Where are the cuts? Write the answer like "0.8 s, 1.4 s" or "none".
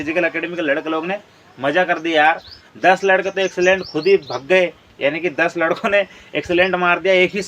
none